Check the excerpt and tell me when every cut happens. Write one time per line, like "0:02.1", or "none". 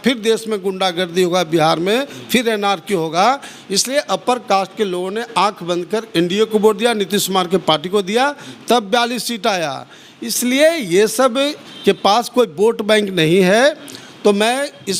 none